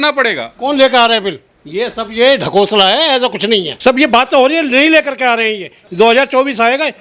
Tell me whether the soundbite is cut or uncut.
cut